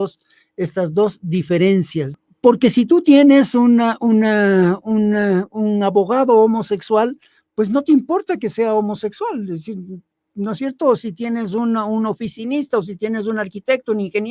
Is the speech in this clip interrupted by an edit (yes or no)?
yes